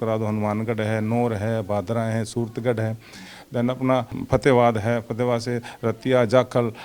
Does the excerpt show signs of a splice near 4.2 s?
yes; 1 cut; at 4.2 s

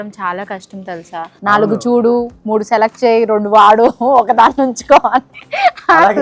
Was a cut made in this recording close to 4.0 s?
no; 1 cut; at 1.4 s

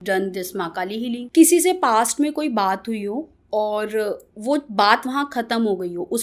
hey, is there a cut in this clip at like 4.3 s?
no; 1 cut; at 1.2 s

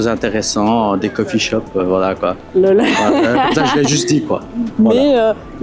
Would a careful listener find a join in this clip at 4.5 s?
no; 0 cuts

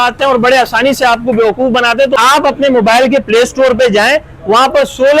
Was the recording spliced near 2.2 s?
yes; 1 cut; at 2.2 s

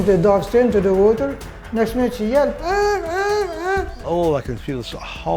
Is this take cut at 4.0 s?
yes; 1 cut; at 4.0 s

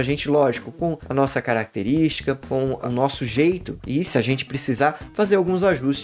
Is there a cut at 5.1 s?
no; 0 cuts

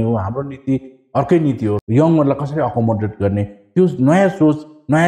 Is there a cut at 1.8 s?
yes; 1 cut; at 1.8 s

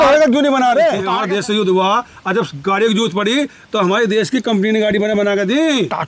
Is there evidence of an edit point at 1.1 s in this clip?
yes; 1 cut; at 1.1 s

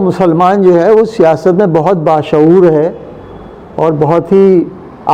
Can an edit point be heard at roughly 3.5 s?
no; 0 cuts

